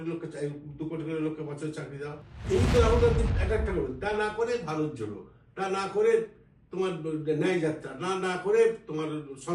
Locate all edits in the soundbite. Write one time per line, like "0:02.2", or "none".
0:02.3